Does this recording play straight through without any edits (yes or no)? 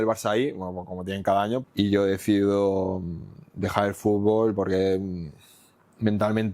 no